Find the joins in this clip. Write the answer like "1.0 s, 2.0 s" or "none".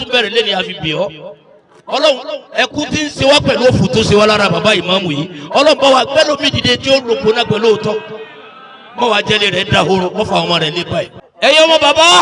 11.2 s